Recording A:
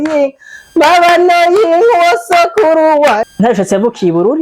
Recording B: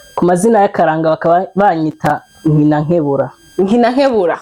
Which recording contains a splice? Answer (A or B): A